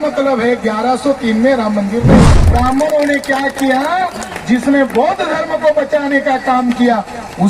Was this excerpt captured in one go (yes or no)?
no